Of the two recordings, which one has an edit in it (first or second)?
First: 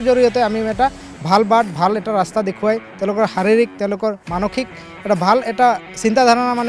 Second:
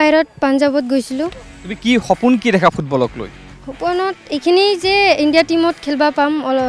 second